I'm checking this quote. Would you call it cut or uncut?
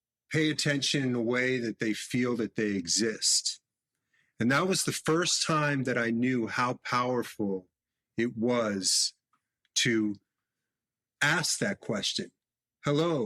uncut